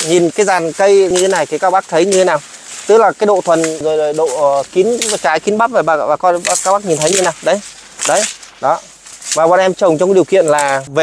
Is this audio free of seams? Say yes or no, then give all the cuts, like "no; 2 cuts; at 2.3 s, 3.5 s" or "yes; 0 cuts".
no; 2 cuts; at 1.1 s, 3.8 s